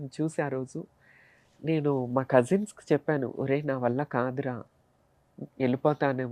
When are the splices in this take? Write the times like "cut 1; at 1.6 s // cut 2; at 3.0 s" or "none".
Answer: none